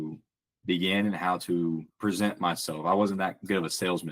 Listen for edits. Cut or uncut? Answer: cut